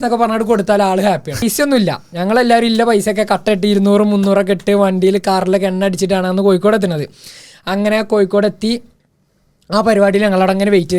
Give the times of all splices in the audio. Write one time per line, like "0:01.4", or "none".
0:01.4